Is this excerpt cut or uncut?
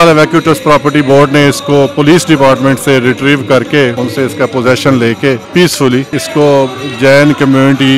cut